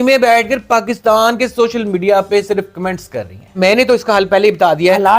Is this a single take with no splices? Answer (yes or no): no